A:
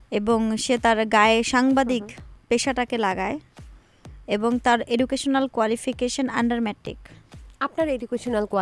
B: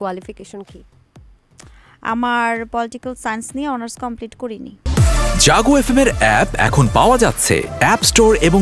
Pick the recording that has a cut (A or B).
B